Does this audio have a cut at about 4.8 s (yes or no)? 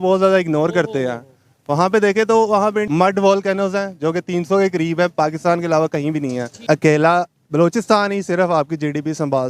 no